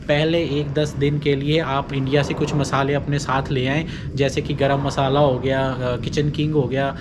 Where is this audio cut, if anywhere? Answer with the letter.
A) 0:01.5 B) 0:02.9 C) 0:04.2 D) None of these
D